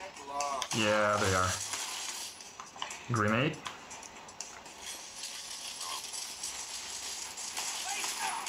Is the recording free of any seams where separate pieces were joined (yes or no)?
no